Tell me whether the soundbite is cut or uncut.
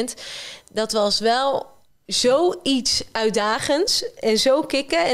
uncut